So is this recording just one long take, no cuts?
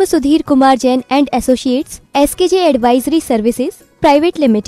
yes; 0 cuts

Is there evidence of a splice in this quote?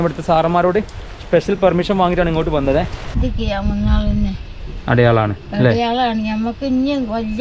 yes; 1 cut; at 3.1 s

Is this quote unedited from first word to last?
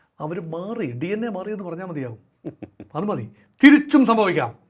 yes; 0 cuts

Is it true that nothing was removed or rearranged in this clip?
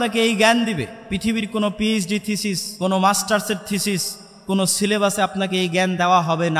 no; 1 cut; at 2.7 s

